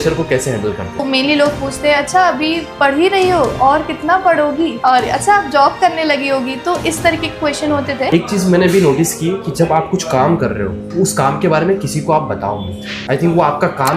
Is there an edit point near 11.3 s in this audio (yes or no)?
no